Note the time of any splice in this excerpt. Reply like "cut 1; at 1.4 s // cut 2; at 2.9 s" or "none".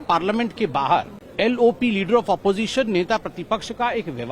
cut 1; at 1.2 s

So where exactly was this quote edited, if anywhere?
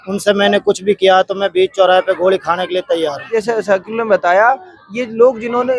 cut 1; at 3.2 s

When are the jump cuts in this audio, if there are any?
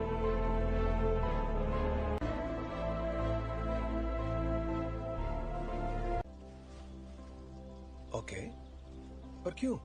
none

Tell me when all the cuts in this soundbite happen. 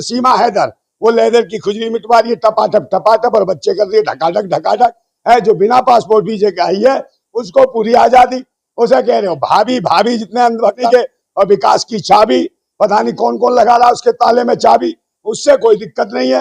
none

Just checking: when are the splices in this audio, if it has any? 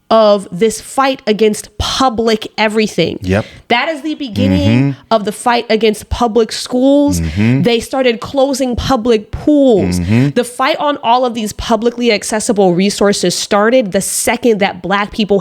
none

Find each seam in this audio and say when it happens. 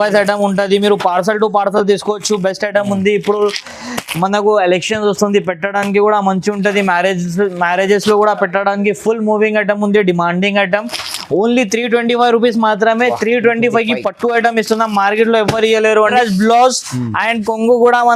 cut 1; at 16.1 s

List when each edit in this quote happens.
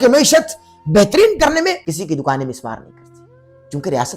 cut 1; at 1.8 s

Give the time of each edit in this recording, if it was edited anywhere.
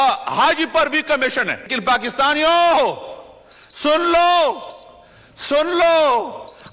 cut 1; at 1.8 s

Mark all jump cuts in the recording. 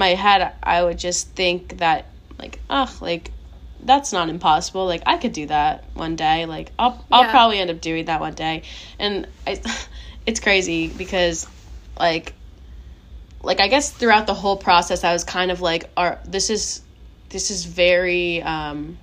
none

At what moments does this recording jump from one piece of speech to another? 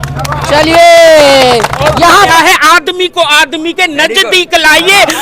cut 1; at 2.3 s

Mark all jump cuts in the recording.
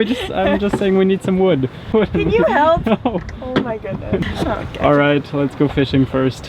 cut 1; at 1.9 s // cut 2; at 4.2 s

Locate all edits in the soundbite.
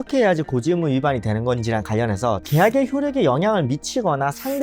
cut 1; at 2.4 s

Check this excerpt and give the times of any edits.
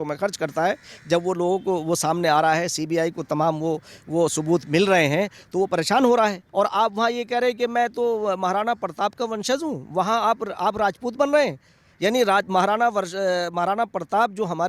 cut 1; at 6.4 s

